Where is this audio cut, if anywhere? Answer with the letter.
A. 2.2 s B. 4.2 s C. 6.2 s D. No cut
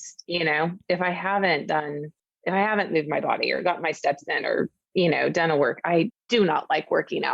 C